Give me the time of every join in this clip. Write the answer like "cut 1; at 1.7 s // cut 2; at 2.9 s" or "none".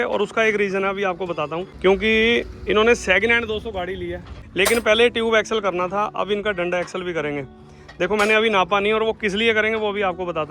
cut 1; at 1.7 s // cut 2; at 4.4 s